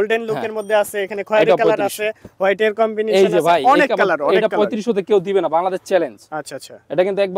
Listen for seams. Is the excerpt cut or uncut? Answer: uncut